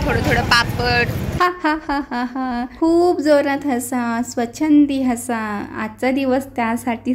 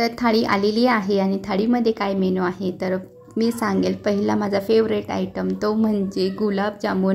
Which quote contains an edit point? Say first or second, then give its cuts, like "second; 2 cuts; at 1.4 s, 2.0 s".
first; 1 cut; at 1.2 s